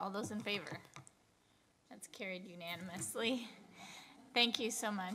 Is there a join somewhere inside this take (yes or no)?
no